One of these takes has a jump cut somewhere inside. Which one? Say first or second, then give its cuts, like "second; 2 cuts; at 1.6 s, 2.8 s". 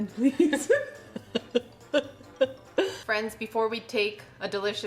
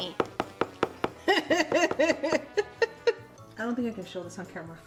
first; 1 cut; at 3.0 s